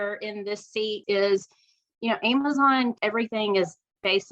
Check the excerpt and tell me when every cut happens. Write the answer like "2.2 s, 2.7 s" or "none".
1.0 s, 3.0 s